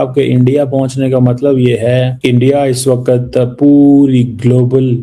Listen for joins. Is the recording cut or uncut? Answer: cut